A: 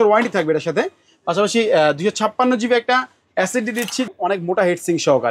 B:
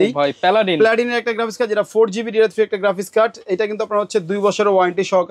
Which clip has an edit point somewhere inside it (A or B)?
A